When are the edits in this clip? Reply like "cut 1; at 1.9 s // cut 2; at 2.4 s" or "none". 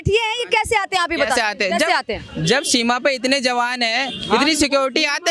none

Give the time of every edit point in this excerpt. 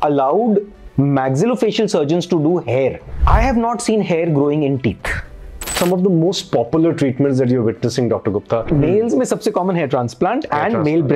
cut 1; at 3.1 s // cut 2; at 5.8 s // cut 3; at 8.7 s

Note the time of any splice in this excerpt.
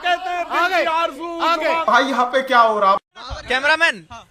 cut 1; at 1.8 s // cut 2; at 3.4 s

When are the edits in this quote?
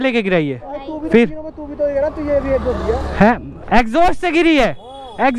none

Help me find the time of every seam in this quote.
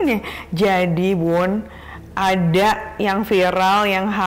none

